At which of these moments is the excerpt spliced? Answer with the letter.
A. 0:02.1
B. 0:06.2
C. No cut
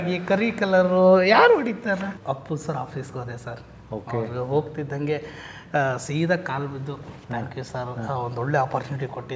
A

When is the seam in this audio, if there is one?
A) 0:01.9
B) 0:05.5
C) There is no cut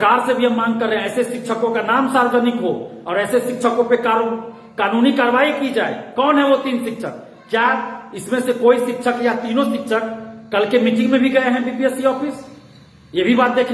C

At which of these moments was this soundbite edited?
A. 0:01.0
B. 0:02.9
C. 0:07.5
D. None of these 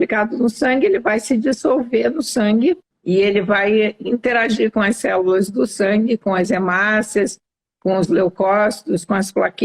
B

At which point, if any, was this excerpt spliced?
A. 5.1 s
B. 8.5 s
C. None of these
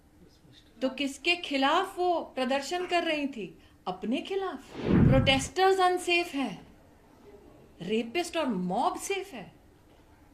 A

